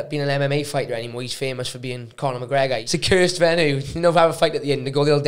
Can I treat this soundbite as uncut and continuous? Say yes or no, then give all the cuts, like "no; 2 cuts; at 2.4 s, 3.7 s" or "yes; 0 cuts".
no; 1 cut; at 2.9 s